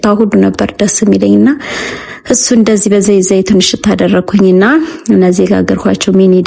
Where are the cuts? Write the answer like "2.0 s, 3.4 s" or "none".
none